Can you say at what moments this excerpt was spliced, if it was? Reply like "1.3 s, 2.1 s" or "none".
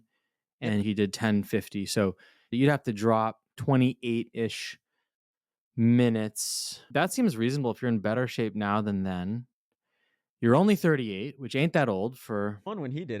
6.9 s